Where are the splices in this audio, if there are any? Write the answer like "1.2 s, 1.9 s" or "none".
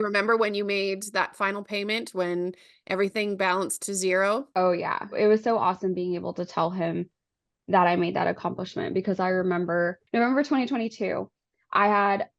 5.1 s